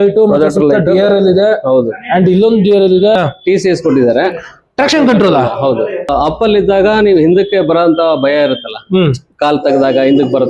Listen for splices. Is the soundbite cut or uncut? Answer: cut